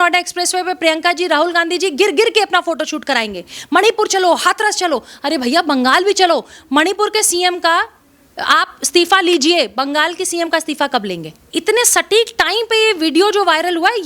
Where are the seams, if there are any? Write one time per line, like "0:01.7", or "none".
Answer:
0:11.3